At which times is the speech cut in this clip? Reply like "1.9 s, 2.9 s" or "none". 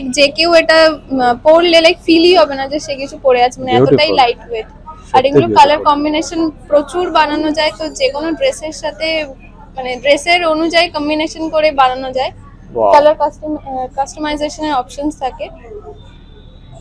none